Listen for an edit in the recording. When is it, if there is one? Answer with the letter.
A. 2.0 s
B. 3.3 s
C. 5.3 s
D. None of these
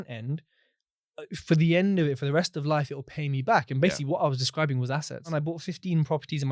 C